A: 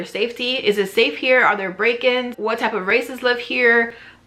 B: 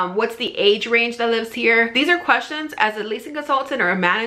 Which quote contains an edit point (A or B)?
A